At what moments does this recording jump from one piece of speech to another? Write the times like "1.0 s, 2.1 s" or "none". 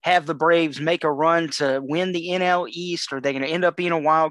none